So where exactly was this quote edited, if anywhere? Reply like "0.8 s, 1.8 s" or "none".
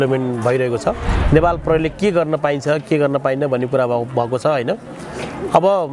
1.1 s

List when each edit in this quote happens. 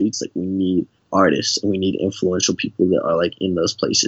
1.0 s

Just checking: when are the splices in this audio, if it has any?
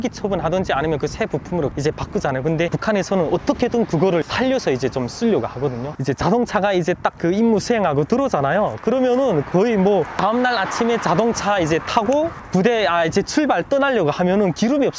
1.8 s, 2.8 s, 4.2 s, 5.9 s, 10.2 s, 12.4 s

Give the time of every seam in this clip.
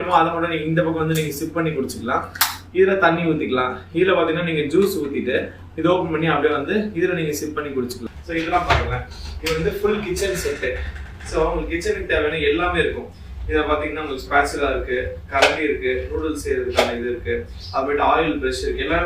8.0 s

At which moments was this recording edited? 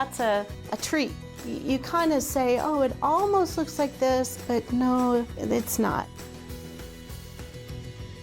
1.2 s, 5.3 s, 6.1 s

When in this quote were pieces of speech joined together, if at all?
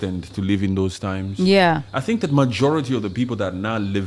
none

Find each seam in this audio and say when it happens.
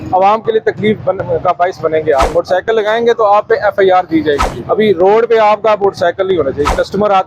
2.3 s, 4.5 s

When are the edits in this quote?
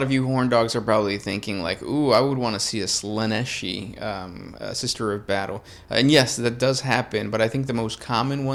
none

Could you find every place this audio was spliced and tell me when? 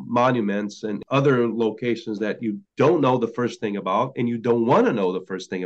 1.0 s, 2.6 s

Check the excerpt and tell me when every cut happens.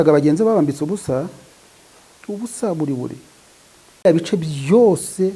4.0 s

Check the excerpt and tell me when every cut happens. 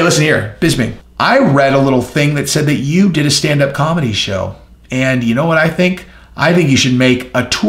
1.0 s

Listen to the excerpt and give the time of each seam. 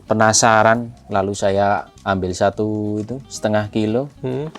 0.9 s, 1.9 s

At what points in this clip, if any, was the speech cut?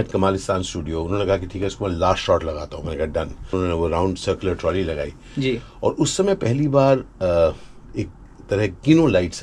3.5 s

